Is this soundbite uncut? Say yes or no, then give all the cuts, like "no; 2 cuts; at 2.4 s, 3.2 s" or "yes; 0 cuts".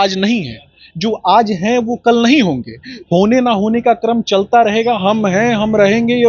yes; 0 cuts